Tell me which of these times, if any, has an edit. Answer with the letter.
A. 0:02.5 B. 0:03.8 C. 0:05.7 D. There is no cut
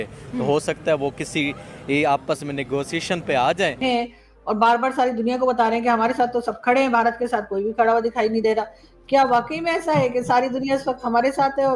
B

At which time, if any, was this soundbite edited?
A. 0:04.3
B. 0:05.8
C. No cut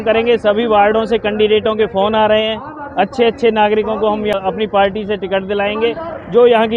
A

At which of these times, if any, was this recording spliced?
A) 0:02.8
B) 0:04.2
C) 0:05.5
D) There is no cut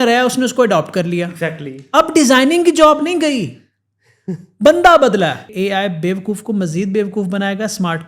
C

